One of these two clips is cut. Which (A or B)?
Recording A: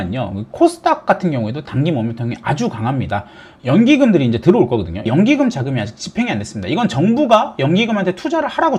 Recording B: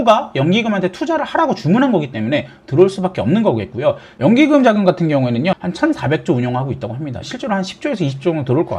B